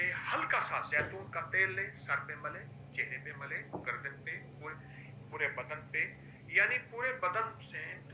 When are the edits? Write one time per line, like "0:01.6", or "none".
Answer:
none